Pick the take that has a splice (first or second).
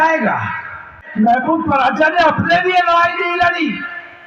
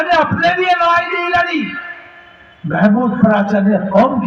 first